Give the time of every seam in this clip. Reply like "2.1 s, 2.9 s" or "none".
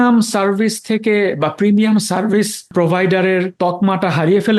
2.7 s, 3.5 s